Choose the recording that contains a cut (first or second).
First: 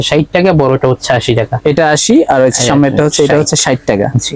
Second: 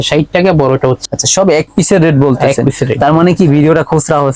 second